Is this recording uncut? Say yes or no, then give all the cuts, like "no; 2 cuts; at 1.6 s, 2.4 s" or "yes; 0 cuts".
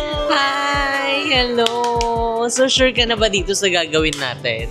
yes; 0 cuts